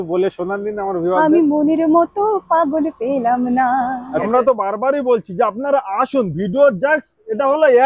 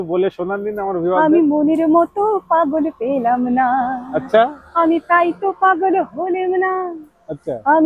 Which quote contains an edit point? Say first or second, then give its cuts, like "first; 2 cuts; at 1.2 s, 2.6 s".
first; 1 cut; at 4.2 s